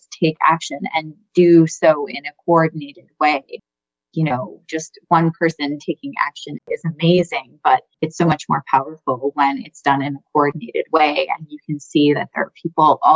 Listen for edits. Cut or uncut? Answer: cut